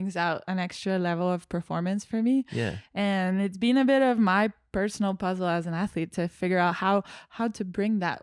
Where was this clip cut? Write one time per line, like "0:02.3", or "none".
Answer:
none